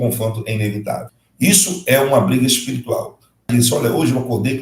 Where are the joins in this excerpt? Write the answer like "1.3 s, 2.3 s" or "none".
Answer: 1.2 s, 3.5 s